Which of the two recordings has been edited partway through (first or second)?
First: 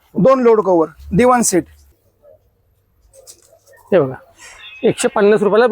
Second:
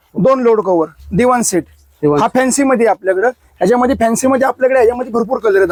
first